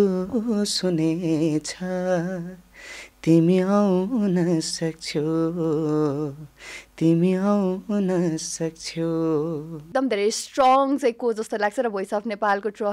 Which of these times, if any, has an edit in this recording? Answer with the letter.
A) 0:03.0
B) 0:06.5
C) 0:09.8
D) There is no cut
C